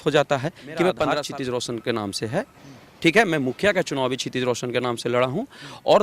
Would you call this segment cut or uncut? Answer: cut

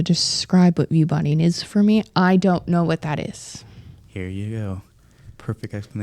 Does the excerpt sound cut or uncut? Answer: uncut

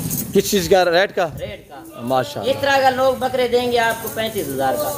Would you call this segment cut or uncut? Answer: uncut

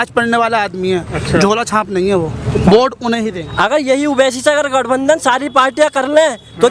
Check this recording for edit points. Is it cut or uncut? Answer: cut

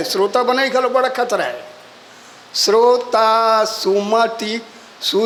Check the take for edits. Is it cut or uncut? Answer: uncut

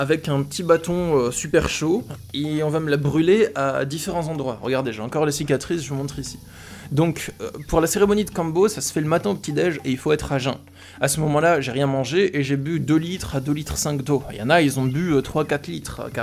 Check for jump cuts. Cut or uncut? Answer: uncut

